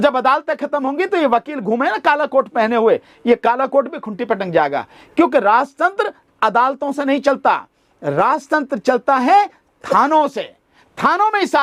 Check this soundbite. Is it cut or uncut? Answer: uncut